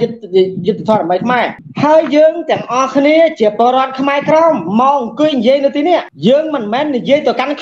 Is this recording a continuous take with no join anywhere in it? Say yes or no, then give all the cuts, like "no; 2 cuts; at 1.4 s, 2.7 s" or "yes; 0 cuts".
no; 1 cut; at 1.6 s